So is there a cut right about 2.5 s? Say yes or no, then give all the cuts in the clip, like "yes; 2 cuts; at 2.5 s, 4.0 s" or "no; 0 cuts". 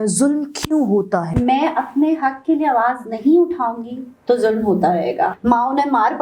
no; 2 cuts; at 1.3 s, 5.4 s